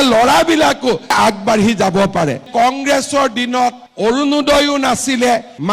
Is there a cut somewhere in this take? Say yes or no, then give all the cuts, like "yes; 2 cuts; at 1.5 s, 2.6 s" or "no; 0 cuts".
yes; 1 cut; at 2.4 s